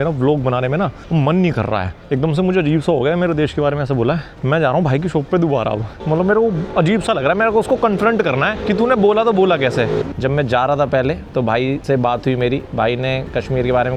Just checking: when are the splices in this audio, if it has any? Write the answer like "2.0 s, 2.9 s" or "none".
1.0 s, 1.9 s, 4.3 s, 5.9 s, 6.6 s, 8.6 s, 10.1 s, 11.8 s

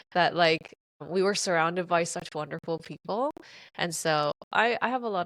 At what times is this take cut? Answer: 1.0 s

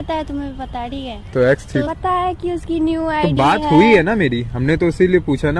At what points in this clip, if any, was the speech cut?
1.9 s

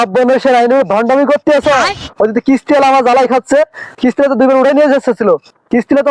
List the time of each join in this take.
none

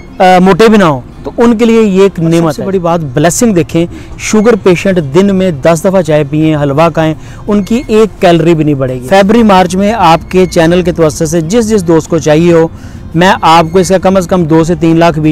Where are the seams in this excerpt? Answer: 2.6 s, 9.0 s

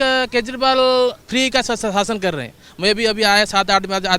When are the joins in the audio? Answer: 1.2 s

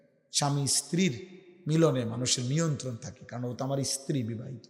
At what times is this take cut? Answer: none

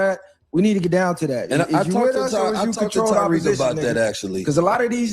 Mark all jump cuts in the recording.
2.2 s

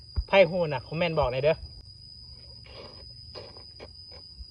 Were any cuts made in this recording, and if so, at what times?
1.8 s

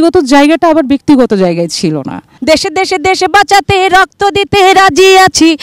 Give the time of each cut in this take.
2.3 s

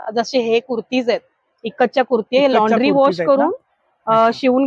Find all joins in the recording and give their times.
none

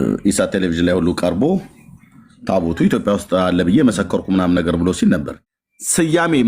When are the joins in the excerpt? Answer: 5.3 s

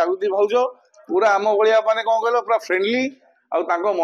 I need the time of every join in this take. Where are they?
none

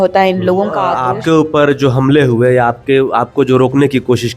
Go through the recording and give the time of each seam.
0.9 s

